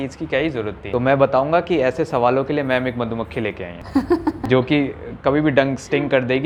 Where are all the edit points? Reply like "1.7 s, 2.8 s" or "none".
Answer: none